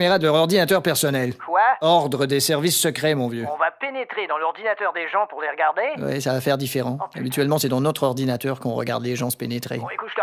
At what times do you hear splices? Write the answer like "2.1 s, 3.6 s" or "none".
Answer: 8.3 s

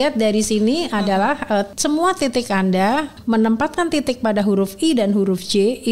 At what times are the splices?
1.7 s, 3.1 s

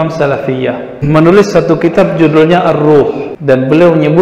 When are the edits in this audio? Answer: 1.0 s, 3.3 s

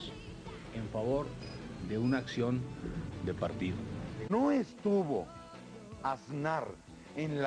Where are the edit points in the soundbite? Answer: 1.3 s

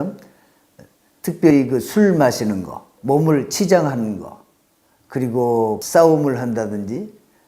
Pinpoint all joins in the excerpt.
2.9 s, 5.8 s

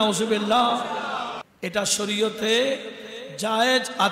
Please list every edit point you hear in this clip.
1.4 s

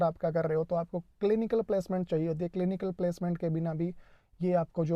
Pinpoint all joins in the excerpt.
none

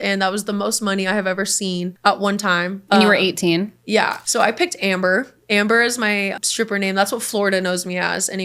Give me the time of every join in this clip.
1.9 s, 2.8 s, 4.2 s, 6.4 s

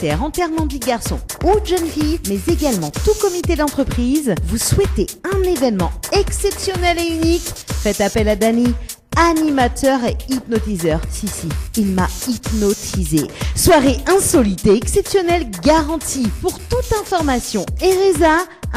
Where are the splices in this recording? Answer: none

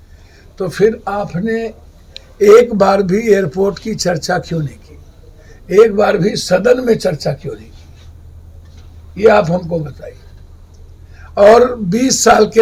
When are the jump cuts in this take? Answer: none

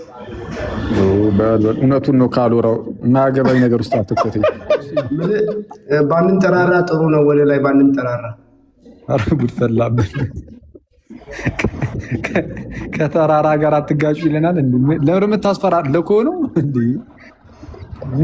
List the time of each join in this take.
5.1 s

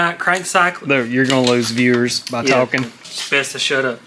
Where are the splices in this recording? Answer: 3.1 s

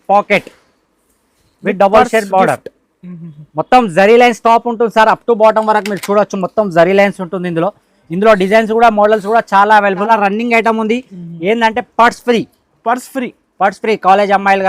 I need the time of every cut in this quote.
10.1 s

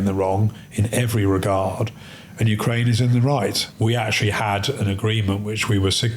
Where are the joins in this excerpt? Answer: 3.7 s

